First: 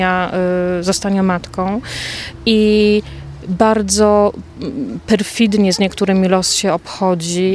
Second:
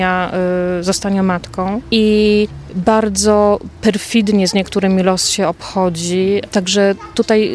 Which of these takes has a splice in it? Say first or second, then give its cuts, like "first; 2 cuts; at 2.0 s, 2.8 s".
second; 4 cuts; at 1.8 s, 2.6 s, 3.7 s, 6.5 s